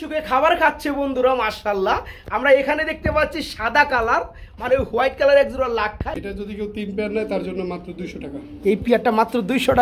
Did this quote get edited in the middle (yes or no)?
yes